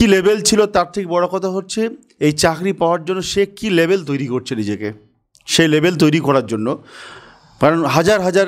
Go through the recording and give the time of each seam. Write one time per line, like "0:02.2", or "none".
none